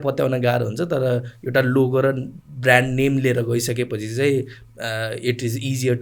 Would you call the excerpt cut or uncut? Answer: uncut